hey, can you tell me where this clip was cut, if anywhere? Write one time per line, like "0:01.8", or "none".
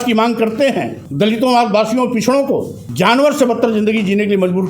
0:01.0
0:02.8